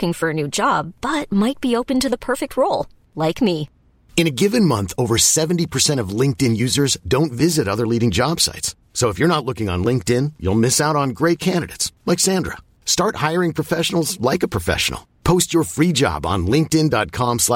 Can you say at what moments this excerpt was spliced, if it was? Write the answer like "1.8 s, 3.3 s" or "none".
none

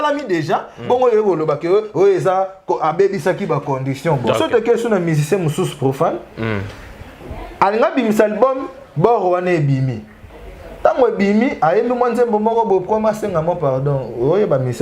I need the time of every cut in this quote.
4.3 s

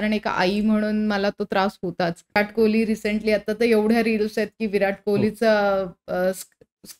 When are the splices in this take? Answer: 2.4 s

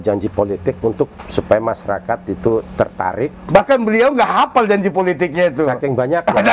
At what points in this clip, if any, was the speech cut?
none

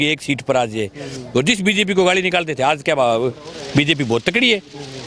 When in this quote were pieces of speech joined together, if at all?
1.2 s

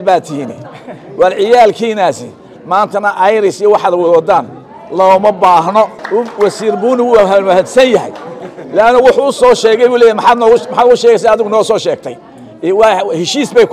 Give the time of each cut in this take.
6.0 s

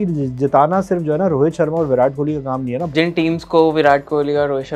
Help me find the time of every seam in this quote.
2.9 s

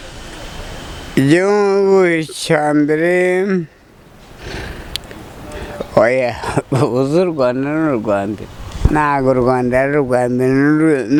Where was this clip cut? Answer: none

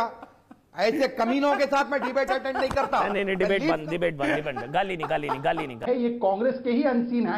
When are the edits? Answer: 5.8 s

